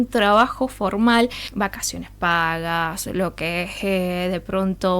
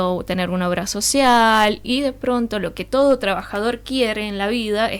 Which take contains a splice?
first; 1 cut; at 1.4 s

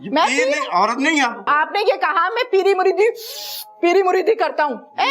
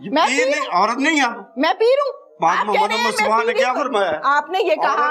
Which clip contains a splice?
first; 1 cut; at 1.5 s

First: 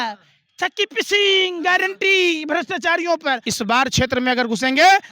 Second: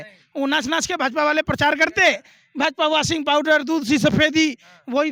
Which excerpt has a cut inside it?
first; 1 cut; at 3.5 s

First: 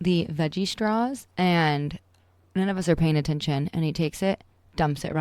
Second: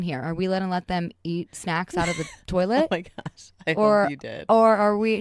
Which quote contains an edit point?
first; 1 cut; at 1.2 s

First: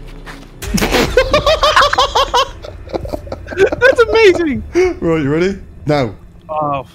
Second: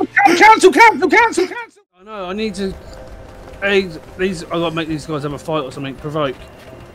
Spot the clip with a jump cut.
second; 1 cut; at 1.5 s

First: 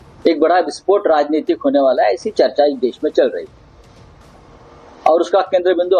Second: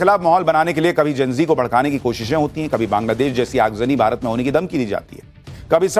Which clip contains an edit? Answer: first; 1 cut; at 2.2 s

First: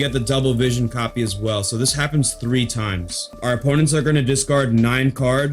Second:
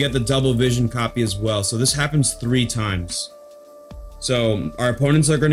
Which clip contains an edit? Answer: first; 1 cut; at 3.4 s

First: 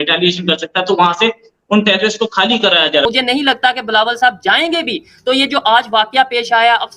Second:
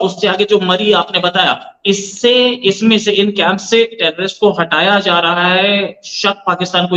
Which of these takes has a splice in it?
first; 1 cut; at 3.0 s

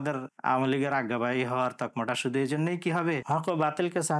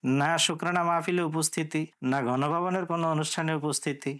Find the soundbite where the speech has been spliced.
first; 1 cut; at 3.2 s

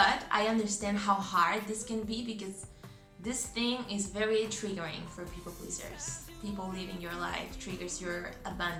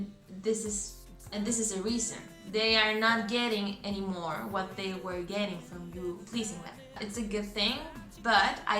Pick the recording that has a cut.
second; 1 cut; at 7.0 s

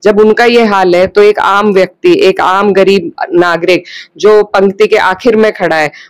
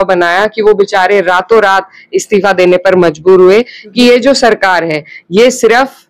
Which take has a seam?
second; 1 cut; at 3.9 s

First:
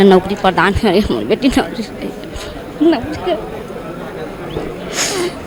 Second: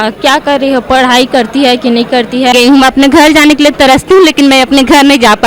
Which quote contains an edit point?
second; 1 cut; at 2.5 s

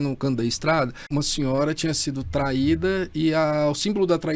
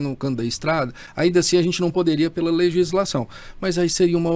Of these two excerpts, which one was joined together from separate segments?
first; 1 cut; at 1.1 s

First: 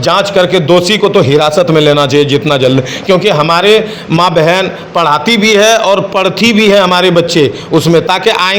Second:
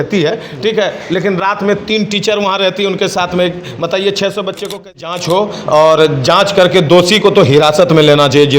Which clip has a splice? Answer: second; 1 cut; at 5.1 s

